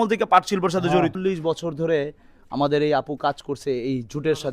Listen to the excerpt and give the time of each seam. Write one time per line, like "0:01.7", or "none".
0:01.2